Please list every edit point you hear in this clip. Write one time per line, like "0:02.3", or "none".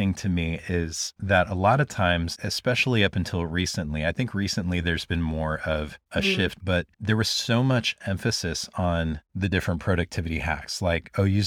0:02.3
0:06.6